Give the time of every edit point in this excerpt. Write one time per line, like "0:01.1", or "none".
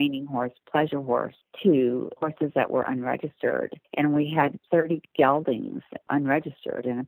0:01.4
0:02.1
0:03.8
0:04.6
0:06.0